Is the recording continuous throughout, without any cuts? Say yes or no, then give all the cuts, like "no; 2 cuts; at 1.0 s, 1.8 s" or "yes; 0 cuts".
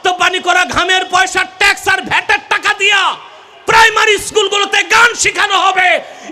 yes; 0 cuts